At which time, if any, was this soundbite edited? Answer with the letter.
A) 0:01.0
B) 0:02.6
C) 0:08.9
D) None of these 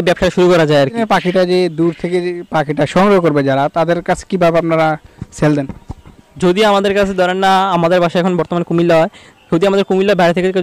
A